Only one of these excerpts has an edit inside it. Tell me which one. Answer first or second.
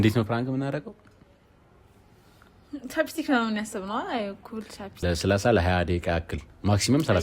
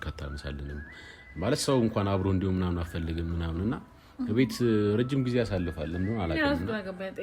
first